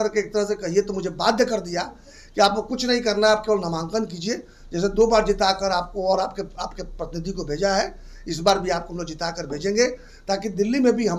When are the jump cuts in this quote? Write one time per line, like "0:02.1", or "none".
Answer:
none